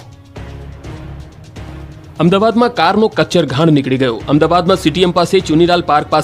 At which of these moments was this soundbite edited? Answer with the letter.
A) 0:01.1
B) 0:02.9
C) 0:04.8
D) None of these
B